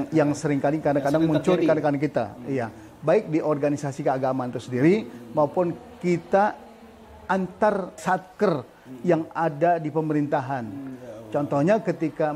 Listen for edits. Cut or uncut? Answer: cut